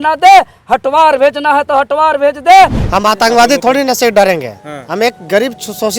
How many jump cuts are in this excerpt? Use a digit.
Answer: 1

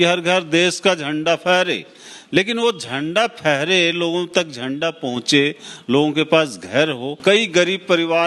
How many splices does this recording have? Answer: 1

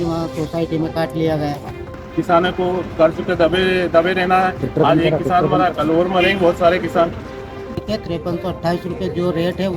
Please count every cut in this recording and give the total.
2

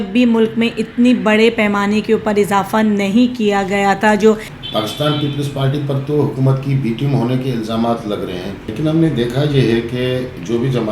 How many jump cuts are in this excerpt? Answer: 2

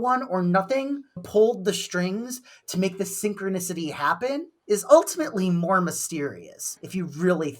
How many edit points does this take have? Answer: 1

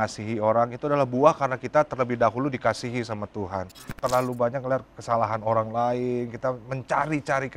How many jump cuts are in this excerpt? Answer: 1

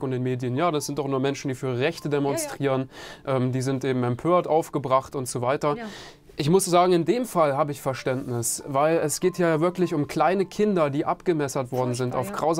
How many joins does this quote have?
0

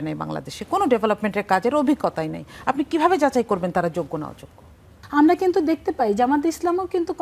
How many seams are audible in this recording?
1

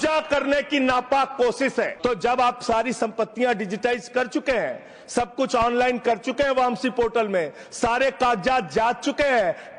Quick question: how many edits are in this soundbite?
1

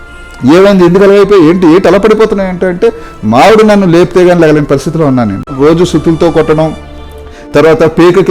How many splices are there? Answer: 1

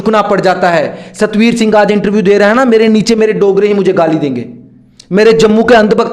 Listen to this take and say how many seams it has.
0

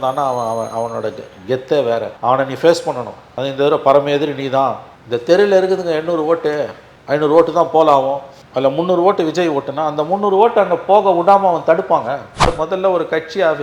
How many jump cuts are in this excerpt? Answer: 2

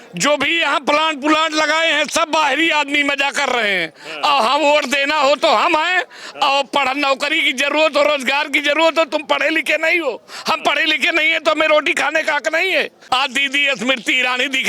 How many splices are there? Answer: 1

